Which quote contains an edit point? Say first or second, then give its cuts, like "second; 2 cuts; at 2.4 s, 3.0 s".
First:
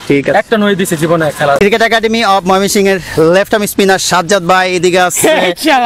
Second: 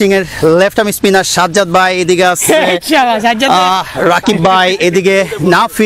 first; 1 cut; at 1.6 s